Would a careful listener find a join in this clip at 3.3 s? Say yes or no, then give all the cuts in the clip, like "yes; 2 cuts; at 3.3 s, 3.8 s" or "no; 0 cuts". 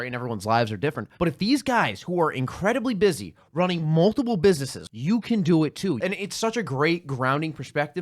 no; 3 cuts; at 1.1 s, 4.8 s, 6.0 s